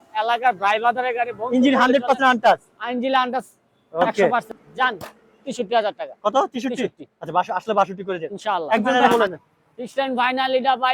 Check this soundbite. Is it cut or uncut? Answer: cut